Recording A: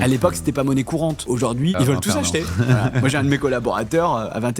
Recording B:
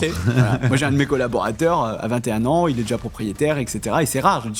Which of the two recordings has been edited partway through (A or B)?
A